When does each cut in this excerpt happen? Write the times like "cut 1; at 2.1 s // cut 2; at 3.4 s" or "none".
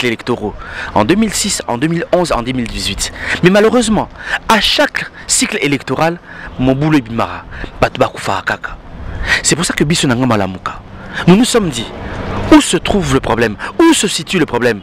none